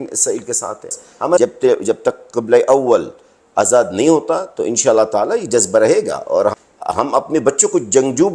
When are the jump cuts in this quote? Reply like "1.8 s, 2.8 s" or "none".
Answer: 1.4 s, 6.5 s